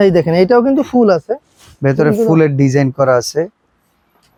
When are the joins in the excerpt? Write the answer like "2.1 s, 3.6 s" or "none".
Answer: none